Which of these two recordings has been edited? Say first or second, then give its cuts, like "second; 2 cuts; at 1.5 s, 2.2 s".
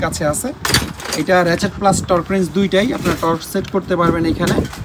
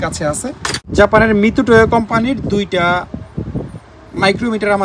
second; 1 cut; at 0.9 s